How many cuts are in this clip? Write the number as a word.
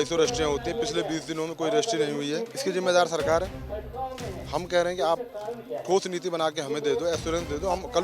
one